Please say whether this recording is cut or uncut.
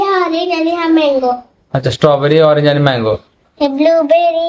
cut